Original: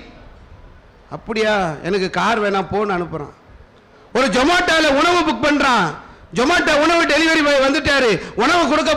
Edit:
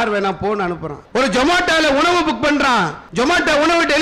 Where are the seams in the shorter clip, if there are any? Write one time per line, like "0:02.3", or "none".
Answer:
0:00.9
0:03.0